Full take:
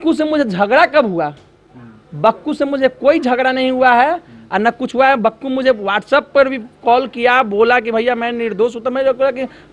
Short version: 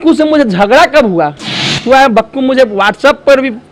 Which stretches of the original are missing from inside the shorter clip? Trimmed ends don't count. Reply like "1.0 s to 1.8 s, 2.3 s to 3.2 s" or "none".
1.8 s to 4.8 s

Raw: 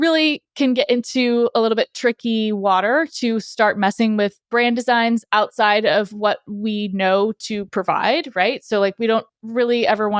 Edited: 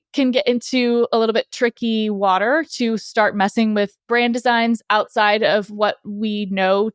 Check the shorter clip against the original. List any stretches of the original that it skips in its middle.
none

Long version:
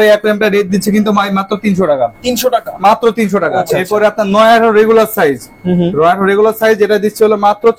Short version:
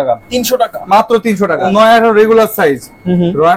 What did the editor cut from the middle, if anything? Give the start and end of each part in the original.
3.6 s to 4.3 s

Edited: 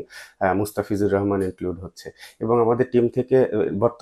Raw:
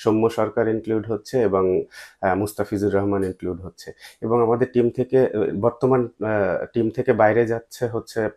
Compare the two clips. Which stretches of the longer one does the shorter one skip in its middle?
none

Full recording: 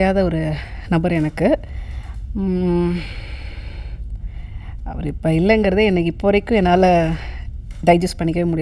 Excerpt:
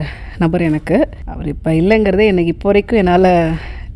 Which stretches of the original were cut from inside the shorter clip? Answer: 1.8 s to 4.9 s

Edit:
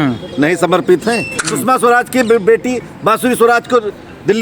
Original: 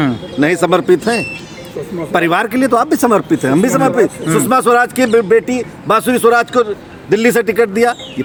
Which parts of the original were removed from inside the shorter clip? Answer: 1.5 s to 4.3 s

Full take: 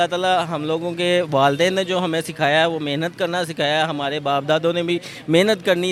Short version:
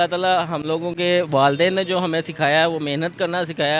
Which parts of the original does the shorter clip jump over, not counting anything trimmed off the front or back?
none

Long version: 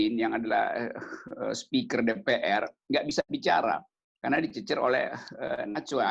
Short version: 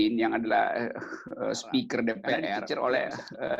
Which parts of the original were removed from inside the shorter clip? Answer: 2.6 s to 4.6 s

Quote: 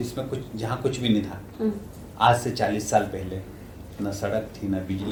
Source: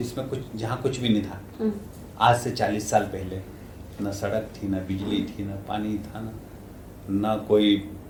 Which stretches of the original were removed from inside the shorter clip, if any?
none

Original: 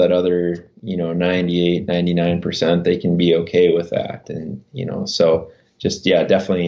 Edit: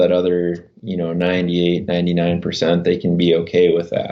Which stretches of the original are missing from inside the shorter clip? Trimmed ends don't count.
none

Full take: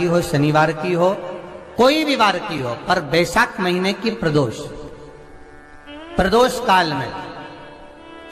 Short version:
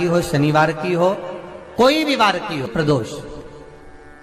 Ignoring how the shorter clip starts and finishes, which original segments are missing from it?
2.7 s to 4.2 s

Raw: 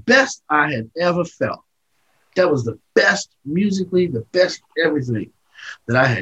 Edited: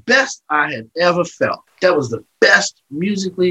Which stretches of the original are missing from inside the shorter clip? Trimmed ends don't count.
1.6 s to 2.2 s

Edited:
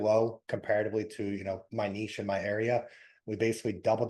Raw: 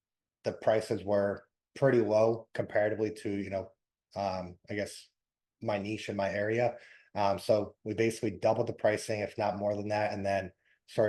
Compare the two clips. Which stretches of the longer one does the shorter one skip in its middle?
3.7 s to 5.5 s, 7.1 s to 7.7 s

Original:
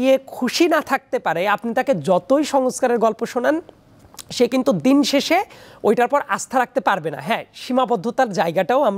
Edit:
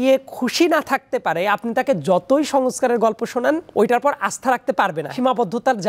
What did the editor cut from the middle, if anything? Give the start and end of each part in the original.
3.7 s to 5.7 s, 7.1 s to 7.6 s

